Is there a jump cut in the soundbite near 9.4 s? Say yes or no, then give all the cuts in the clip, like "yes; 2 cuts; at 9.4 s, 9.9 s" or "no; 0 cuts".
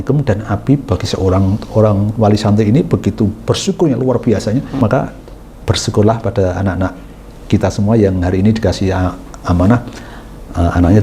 no; 1 cut; at 4.8 s